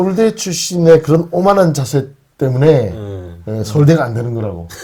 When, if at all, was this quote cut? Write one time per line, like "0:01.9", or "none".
none